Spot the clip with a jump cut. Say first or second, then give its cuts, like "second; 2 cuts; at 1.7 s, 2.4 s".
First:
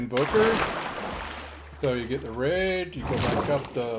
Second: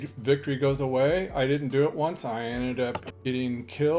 second; 1 cut; at 3.1 s